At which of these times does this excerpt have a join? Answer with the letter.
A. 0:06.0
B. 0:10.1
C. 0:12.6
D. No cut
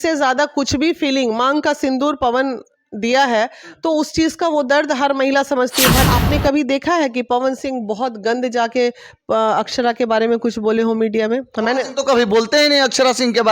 A